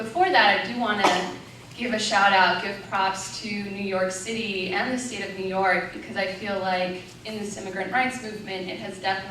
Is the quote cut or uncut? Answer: cut